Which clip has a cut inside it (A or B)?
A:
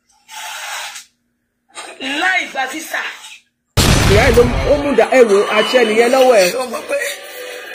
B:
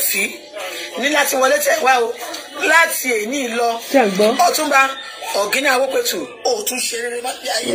A